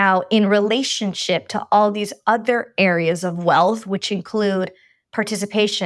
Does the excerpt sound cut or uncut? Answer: uncut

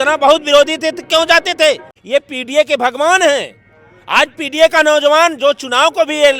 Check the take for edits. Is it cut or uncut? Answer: cut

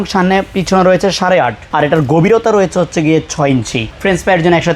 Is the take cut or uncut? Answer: cut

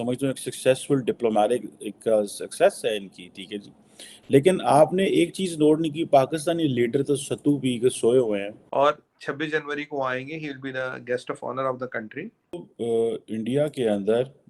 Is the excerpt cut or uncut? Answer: cut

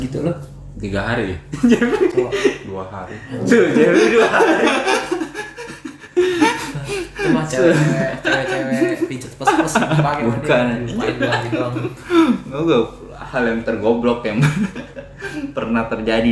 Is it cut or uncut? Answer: uncut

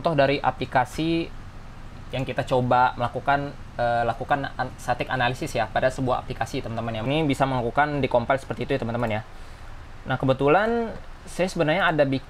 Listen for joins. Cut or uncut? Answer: cut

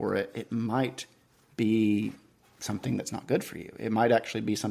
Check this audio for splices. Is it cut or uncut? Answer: uncut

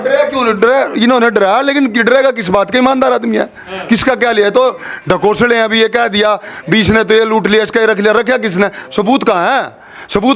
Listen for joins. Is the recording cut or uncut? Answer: uncut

